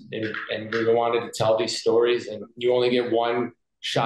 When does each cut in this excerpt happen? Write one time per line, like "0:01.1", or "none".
0:02.5